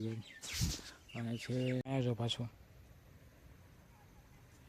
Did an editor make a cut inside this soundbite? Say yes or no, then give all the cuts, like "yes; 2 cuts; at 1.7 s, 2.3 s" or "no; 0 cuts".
yes; 1 cut; at 1.8 s